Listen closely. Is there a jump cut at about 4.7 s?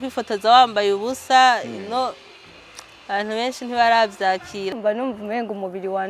yes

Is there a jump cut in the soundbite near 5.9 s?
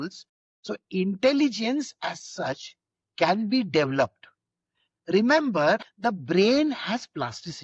yes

